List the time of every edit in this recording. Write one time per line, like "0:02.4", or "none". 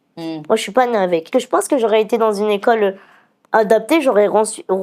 0:01.3